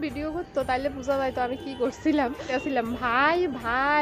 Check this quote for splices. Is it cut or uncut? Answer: cut